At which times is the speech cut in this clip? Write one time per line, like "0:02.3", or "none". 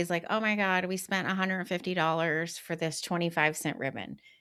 none